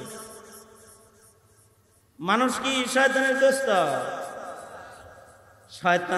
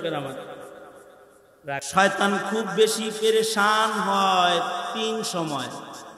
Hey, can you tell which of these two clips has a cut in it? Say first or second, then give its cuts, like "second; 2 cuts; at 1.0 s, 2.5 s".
second; 1 cut; at 1.8 s